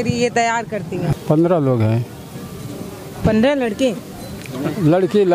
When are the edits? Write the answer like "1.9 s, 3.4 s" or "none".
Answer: 1.2 s